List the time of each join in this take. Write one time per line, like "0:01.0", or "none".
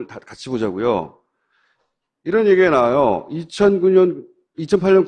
0:04.1